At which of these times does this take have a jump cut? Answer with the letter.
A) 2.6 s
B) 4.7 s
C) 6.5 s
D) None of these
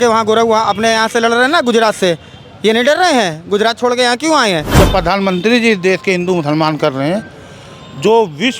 B